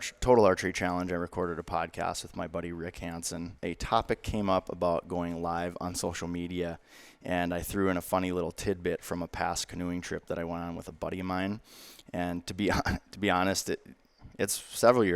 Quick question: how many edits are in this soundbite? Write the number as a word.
one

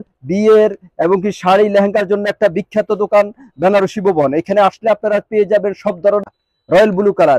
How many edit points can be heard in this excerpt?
one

